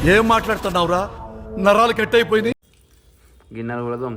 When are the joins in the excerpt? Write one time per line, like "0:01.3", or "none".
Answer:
0:02.5